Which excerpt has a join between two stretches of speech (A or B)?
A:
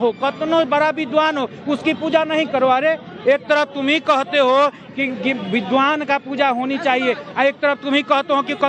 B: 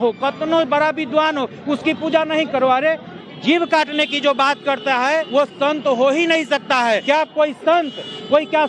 B